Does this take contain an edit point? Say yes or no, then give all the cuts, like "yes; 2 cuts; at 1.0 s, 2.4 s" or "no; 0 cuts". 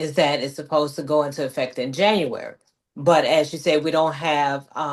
no; 0 cuts